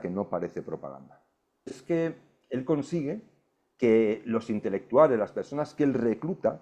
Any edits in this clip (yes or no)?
yes